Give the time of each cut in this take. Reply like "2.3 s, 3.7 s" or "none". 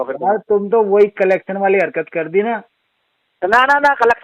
none